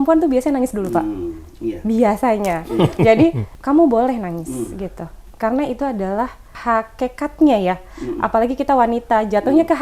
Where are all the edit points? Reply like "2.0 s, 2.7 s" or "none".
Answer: 3.5 s, 6.5 s